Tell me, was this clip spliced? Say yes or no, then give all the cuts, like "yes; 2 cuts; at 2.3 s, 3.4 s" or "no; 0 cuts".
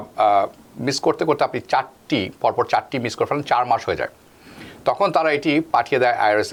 no; 0 cuts